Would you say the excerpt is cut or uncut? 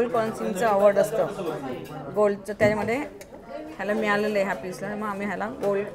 uncut